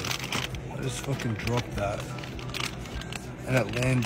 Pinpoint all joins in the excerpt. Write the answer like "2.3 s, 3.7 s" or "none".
none